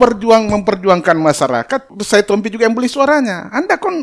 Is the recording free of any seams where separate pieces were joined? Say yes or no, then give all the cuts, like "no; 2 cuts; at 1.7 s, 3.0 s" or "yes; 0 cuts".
no; 1 cut; at 1.9 s